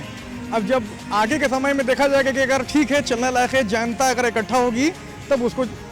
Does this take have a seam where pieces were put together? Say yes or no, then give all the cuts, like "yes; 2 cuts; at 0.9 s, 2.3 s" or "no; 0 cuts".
no; 0 cuts